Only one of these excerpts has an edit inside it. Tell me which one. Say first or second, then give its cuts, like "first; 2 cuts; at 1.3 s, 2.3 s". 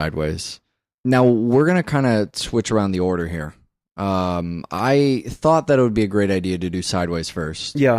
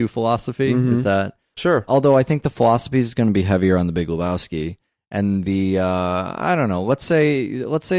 second; 1 cut; at 5.6 s